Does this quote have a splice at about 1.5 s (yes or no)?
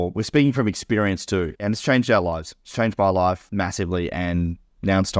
yes